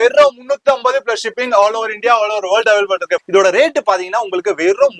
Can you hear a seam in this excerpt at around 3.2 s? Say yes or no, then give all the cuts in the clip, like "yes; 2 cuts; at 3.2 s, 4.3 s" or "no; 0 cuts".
yes; 1 cut; at 3.2 s